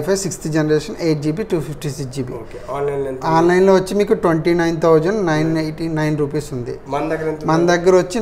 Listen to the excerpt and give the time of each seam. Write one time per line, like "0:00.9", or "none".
none